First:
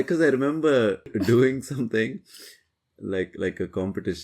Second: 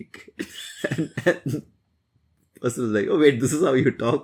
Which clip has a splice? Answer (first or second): first